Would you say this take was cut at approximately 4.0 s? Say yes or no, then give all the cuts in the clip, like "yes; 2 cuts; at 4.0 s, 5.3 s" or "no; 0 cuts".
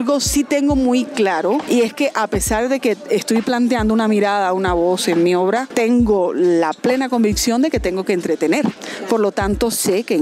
no; 3 cuts; at 1.6 s, 5.7 s, 8.9 s